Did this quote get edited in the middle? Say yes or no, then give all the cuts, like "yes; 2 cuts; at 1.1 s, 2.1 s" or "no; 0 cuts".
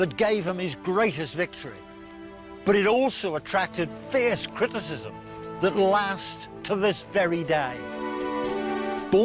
no; 0 cuts